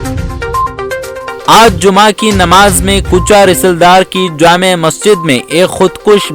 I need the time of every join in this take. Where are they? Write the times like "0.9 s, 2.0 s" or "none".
1.4 s